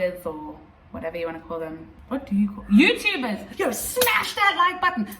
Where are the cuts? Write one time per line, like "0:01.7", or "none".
0:01.9
0:03.4